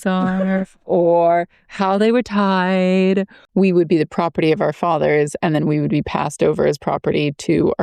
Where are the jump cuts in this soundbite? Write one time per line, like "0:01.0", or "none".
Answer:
0:03.4